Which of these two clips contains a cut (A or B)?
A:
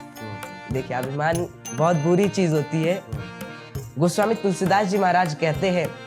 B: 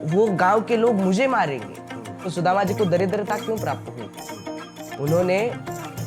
B